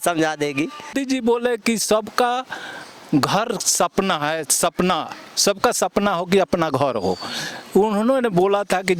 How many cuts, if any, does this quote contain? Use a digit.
1